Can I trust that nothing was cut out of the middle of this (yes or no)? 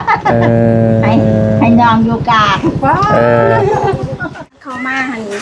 no